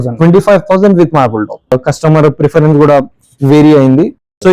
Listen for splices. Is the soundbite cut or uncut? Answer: cut